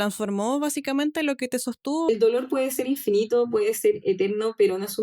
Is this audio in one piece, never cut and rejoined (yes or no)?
no